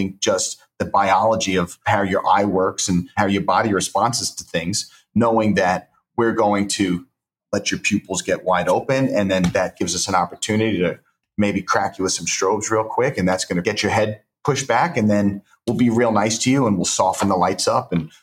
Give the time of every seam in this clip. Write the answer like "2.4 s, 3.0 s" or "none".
1.8 s, 3.1 s, 7.4 s, 13.6 s